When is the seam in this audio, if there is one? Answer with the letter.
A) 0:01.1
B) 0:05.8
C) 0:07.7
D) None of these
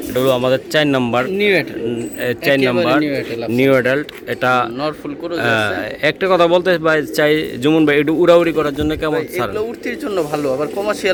D